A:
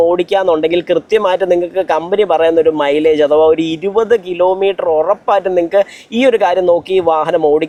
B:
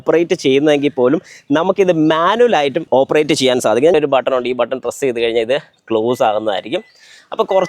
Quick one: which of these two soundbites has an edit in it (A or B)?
B